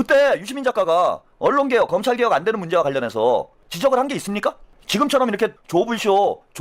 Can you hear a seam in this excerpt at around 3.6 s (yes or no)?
yes